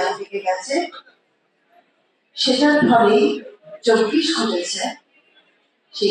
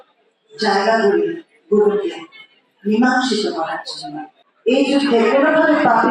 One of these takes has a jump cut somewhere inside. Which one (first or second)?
second